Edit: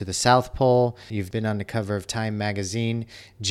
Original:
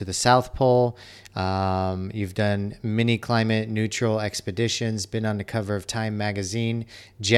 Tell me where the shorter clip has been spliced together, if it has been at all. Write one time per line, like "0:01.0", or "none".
0:01.2